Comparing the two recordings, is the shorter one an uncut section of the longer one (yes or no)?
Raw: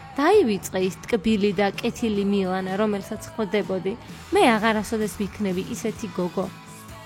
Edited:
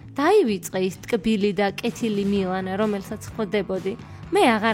yes